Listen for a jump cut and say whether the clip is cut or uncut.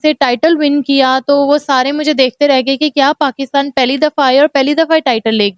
uncut